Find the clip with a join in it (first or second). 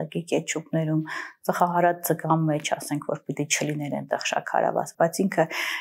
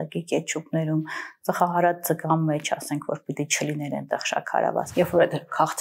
second